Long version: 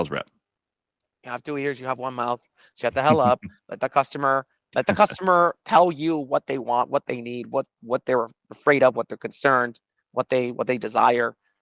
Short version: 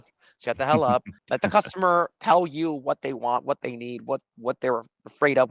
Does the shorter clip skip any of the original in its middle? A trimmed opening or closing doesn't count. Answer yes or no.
yes